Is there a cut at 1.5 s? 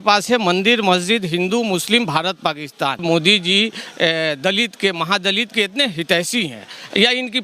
no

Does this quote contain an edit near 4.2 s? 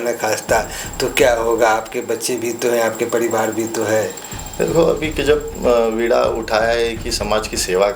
no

